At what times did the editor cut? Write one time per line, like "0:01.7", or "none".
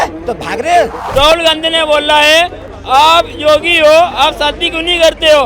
0:01.0